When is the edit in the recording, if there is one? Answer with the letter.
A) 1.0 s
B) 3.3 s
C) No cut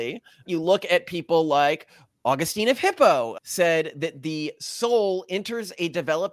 B